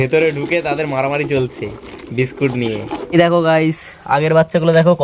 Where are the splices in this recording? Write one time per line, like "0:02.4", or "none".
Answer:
0:03.1